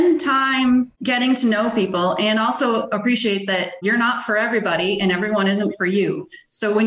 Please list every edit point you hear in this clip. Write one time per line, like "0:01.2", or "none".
0:01.0
0:03.8

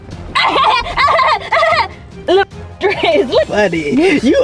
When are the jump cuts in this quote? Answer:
0:03.5

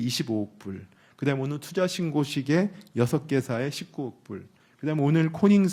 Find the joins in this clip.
none

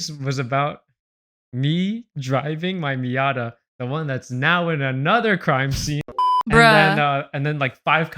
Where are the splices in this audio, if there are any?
0:06.0

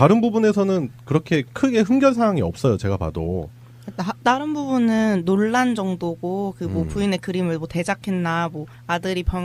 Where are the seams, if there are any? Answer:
0:05.9

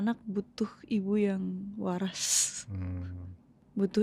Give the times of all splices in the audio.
none

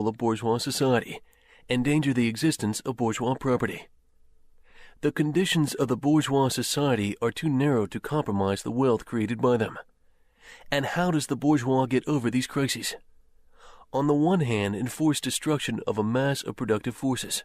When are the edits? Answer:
0:07.5

